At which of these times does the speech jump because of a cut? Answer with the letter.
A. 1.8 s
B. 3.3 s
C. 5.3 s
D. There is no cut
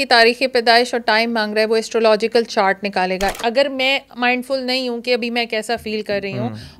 B